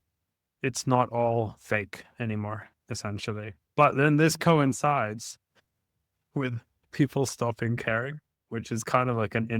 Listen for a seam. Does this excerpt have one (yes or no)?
yes